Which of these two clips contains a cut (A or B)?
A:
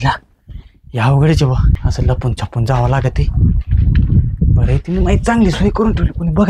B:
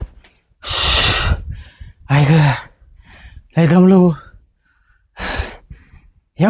A